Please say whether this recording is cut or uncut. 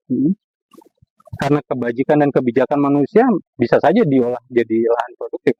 uncut